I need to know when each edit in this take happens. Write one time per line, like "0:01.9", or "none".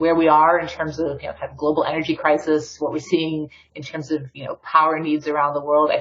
none